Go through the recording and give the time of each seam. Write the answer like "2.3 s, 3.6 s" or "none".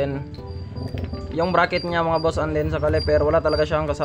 none